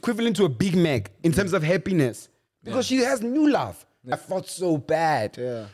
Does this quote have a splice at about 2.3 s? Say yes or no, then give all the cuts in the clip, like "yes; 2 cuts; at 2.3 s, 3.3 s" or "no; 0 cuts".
no; 1 cut; at 4.2 s